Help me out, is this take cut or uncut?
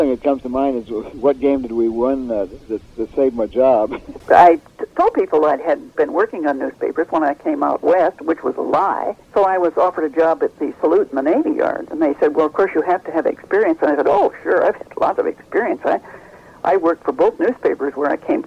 cut